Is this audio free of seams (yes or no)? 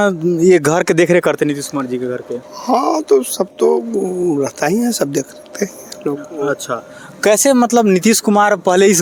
yes